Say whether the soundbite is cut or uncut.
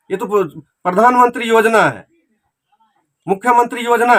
uncut